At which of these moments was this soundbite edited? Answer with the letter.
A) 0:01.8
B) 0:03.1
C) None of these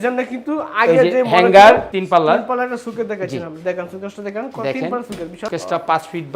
A